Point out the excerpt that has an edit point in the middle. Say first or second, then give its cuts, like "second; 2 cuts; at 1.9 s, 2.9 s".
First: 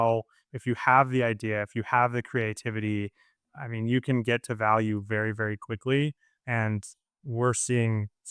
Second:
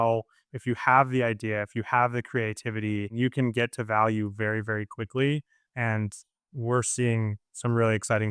second; 1 cut; at 3.1 s